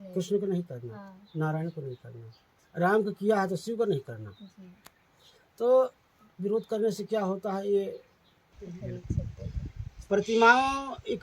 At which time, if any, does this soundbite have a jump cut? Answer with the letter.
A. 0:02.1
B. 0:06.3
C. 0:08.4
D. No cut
C